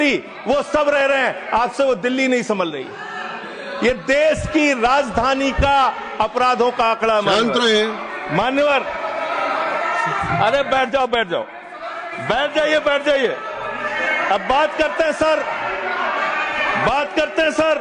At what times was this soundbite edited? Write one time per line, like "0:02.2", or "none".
none